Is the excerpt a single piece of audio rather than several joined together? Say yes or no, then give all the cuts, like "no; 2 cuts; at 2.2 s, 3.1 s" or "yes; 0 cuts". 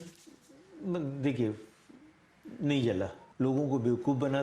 no; 1 cut; at 3.2 s